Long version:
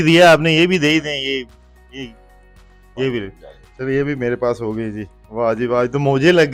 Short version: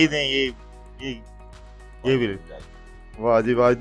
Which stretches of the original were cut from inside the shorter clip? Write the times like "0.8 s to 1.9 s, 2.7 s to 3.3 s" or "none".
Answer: 3.8 s to 5.0 s